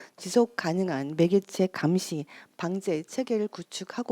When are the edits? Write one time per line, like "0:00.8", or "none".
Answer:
none